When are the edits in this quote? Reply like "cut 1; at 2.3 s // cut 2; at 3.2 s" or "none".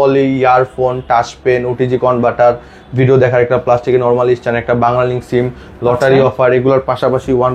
none